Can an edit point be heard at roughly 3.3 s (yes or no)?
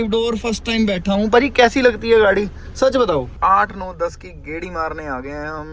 yes